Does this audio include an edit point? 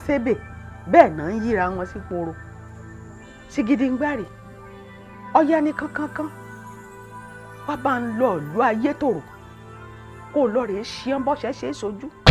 no; 0 cuts

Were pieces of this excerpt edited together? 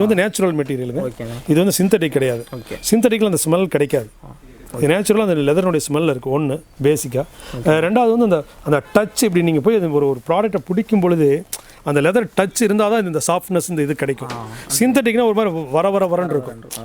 no; 0 cuts

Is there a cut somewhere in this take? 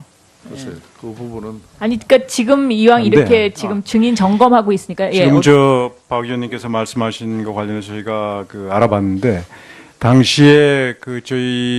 yes; 1 cut; at 10.2 s

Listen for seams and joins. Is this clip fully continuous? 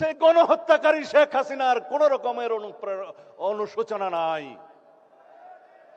yes; 0 cuts

